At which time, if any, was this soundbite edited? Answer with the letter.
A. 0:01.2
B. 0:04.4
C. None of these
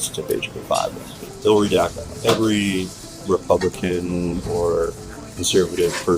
A